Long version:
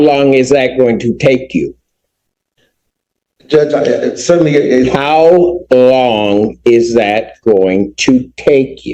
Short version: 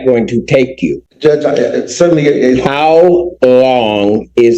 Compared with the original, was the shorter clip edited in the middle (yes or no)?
yes